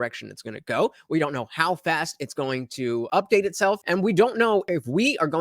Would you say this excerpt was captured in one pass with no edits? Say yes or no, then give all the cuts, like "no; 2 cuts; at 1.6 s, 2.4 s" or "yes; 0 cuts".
no; 3 cuts; at 3.1 s, 3.8 s, 4.7 s